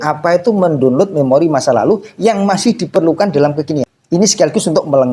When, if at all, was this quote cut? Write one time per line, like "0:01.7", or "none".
0:04.0